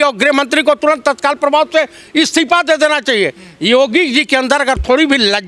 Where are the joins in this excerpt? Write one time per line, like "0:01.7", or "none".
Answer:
none